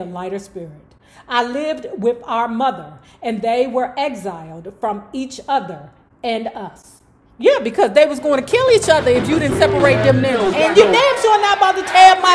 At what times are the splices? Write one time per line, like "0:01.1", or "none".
0:10.5